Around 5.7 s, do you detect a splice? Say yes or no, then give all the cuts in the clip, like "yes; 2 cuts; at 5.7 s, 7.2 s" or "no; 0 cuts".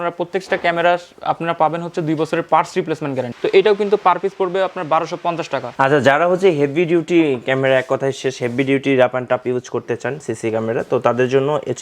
yes; 2 cuts; at 3.3 s, 5.7 s